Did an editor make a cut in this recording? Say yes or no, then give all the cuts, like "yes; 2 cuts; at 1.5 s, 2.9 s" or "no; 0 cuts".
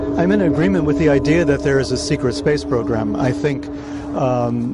no; 0 cuts